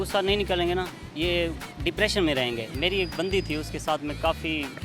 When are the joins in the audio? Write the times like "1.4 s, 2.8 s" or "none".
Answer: 2.7 s